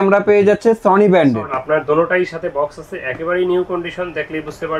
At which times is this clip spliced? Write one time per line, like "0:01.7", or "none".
0:01.5